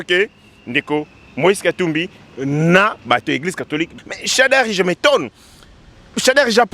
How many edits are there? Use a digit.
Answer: 1